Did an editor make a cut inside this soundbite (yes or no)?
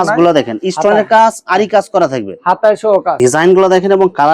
yes